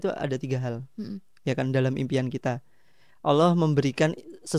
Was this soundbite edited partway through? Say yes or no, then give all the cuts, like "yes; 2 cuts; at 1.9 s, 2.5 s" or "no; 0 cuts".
no; 0 cuts